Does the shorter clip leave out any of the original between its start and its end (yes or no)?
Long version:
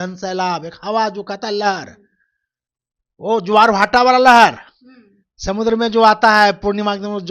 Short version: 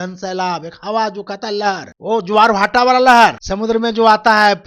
yes